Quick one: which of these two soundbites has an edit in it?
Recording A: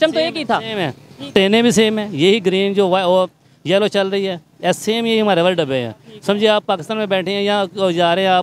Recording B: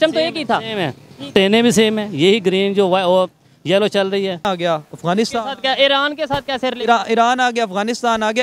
B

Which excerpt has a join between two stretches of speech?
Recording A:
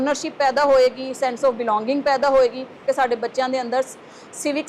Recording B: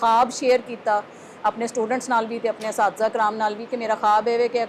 A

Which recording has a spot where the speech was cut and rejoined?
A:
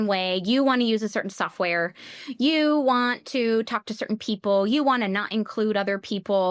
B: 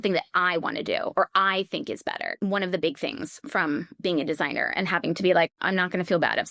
B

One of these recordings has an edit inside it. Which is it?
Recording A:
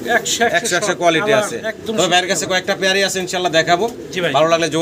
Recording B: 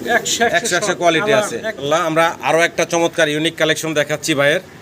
B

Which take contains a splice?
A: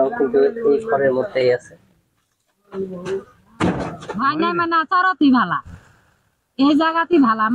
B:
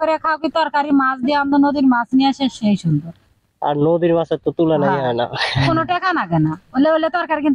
A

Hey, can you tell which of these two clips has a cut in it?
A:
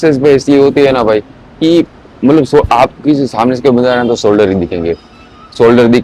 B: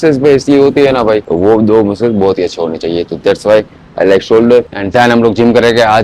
B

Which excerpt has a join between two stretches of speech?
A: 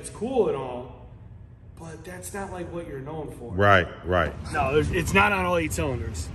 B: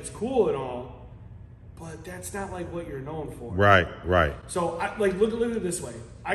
A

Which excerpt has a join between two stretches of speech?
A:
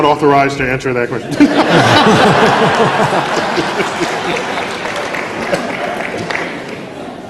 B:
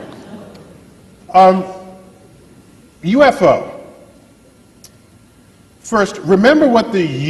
B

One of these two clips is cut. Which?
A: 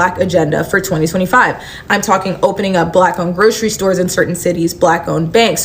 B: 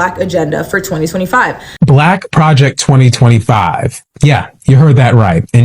B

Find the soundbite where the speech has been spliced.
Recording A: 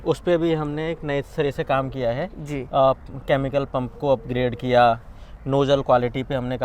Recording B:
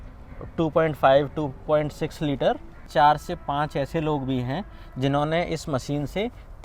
B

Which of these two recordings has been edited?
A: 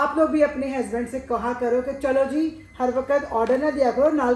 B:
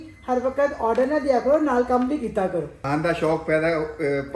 B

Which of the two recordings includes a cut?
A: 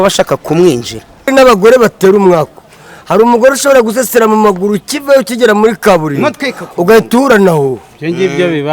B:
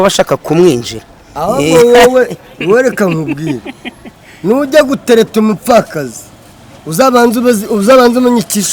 A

